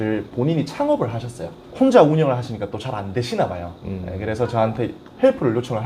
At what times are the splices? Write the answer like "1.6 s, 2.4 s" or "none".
1.6 s